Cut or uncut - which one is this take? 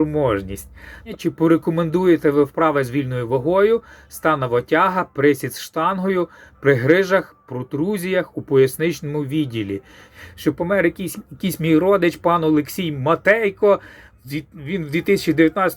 cut